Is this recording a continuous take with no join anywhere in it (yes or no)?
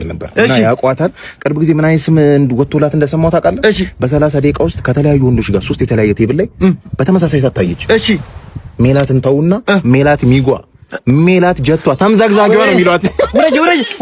yes